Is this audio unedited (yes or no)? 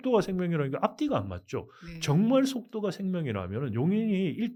yes